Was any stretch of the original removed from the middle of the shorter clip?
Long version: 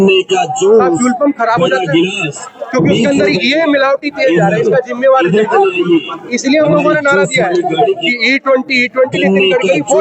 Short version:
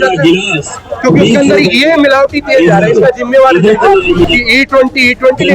yes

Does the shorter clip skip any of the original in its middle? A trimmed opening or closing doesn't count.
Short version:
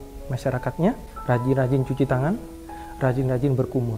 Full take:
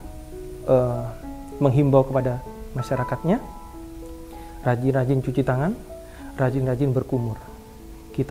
yes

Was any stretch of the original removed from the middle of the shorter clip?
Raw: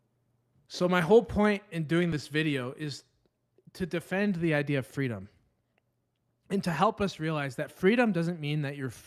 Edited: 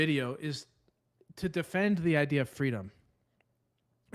no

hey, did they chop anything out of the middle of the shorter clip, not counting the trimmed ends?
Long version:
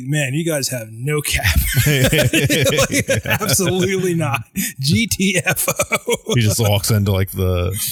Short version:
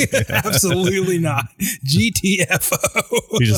no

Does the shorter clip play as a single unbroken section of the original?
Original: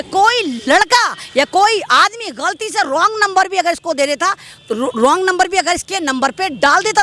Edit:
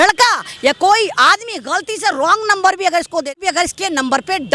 no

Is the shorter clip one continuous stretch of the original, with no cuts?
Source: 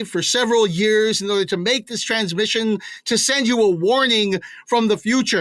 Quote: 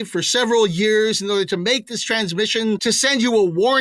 no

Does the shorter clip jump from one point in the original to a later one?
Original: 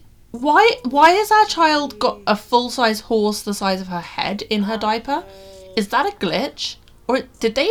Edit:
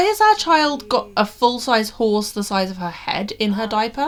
no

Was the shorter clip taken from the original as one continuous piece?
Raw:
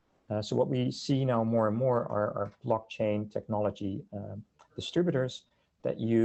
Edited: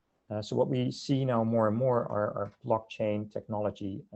yes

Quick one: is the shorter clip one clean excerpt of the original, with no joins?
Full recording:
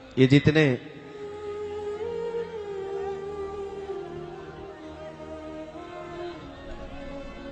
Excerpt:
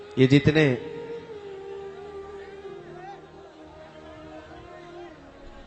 no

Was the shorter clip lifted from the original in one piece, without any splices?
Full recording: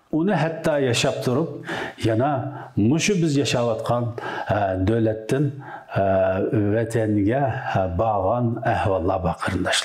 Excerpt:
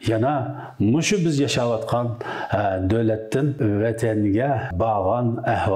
no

